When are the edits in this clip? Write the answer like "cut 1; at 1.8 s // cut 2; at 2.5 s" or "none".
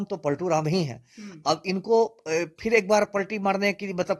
none